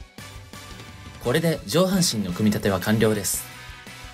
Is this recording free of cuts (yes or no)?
no